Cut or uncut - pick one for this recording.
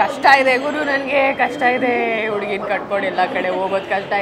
uncut